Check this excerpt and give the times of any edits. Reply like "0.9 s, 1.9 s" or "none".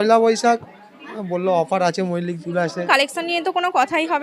2.9 s